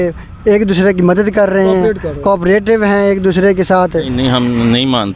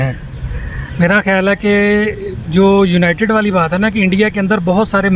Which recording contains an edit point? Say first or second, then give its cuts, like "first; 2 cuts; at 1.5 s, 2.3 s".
first; 1 cut; at 4.0 s